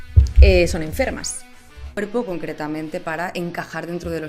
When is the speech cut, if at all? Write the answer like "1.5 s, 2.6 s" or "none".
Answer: 2.0 s